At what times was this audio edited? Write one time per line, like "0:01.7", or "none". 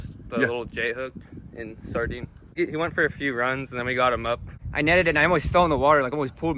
0:02.4
0:04.6